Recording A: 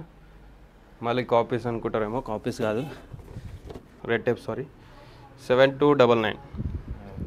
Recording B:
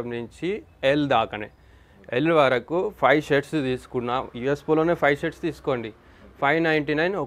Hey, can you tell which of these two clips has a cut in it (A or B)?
A